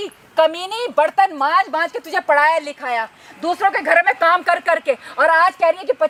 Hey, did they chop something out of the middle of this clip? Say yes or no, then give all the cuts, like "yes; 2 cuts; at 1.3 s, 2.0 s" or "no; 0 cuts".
no; 0 cuts